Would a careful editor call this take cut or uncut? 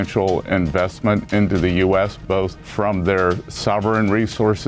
cut